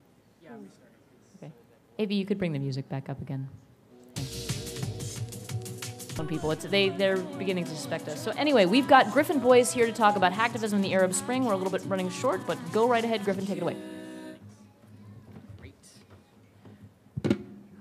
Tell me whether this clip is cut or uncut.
uncut